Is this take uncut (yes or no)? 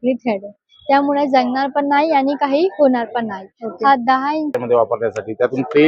no